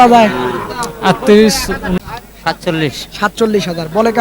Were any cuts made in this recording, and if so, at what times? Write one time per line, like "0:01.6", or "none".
0:02.0